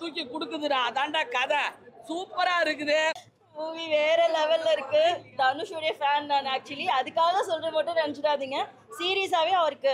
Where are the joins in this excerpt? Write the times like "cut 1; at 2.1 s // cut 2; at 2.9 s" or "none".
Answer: cut 1; at 3.3 s